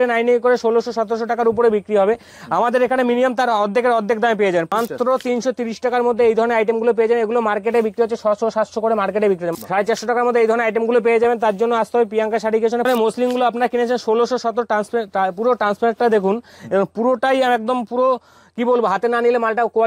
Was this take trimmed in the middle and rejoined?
yes; 3 cuts; at 4.7 s, 9.5 s, 12.9 s

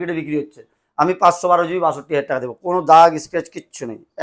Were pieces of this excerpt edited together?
no; 0 cuts

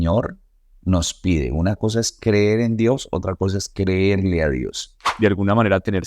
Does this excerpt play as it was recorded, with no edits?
no; 1 cut; at 5.1 s

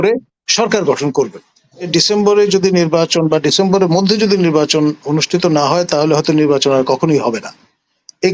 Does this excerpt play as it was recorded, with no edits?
no; 1 cut; at 1.9 s

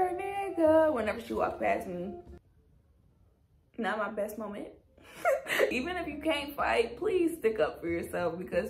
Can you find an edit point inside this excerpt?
no; 0 cuts

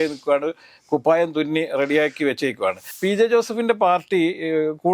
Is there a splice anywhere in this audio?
yes; 1 cut; at 2.9 s

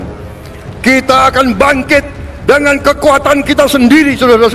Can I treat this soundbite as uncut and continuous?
yes; 0 cuts

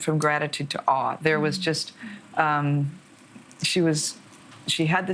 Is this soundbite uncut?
yes; 0 cuts

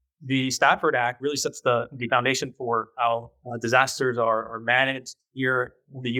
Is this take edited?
no; 0 cuts

